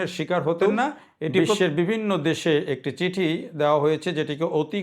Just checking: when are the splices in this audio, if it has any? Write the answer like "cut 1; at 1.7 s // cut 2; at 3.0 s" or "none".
cut 1; at 1.6 s